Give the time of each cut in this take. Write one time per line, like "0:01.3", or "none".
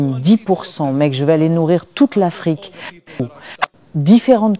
0:03.2

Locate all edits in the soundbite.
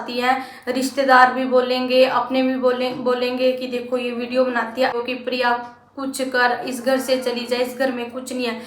0:04.9

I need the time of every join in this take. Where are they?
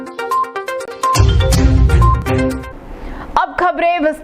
0:02.6

